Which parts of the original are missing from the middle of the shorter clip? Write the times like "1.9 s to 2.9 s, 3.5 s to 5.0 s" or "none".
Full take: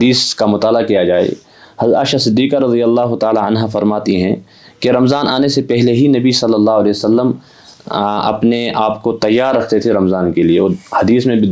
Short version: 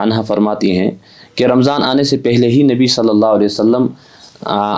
none